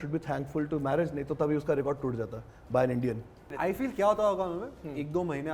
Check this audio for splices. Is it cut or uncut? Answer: cut